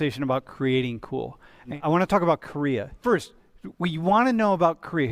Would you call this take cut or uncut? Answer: cut